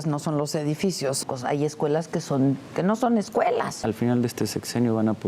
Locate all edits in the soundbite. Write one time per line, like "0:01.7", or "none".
0:01.2
0:03.7